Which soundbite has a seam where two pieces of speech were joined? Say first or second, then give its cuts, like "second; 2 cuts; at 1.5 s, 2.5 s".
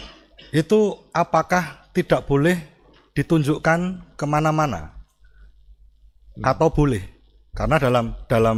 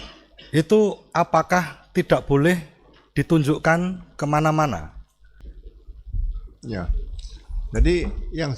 second; 1 cut; at 5.5 s